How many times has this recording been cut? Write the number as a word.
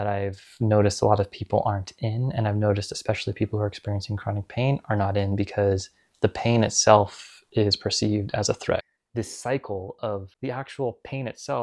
one